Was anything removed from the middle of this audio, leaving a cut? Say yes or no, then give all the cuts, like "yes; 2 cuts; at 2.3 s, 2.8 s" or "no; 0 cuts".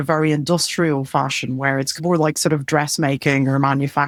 no; 0 cuts